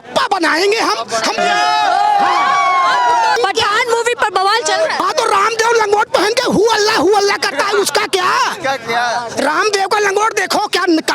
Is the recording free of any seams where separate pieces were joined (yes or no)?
no